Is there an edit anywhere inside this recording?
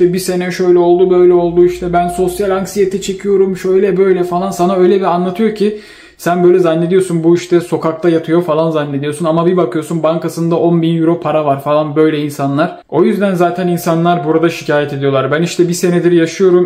yes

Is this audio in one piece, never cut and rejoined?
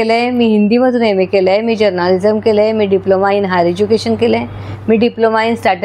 yes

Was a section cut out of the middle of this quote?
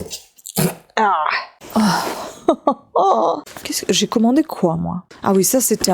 yes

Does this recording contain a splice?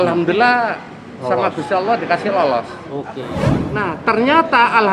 yes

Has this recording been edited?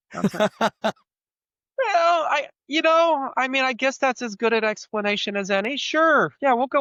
no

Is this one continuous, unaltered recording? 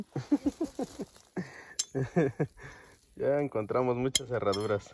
yes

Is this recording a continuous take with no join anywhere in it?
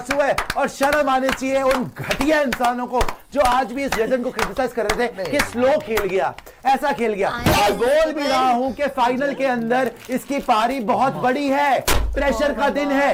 yes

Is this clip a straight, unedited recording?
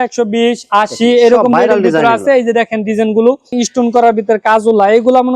no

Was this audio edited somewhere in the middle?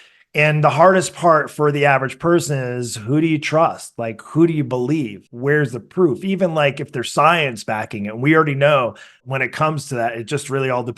yes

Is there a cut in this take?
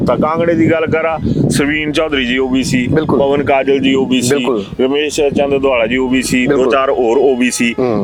no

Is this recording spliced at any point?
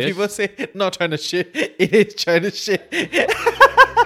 no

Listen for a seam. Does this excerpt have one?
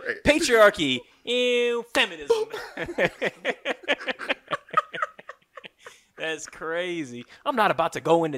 no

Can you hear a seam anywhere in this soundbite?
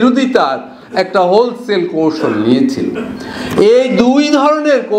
no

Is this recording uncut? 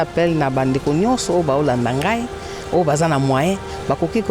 yes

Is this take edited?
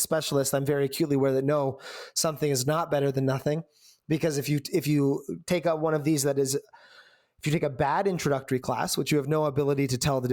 no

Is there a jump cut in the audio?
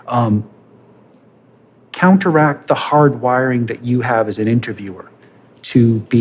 no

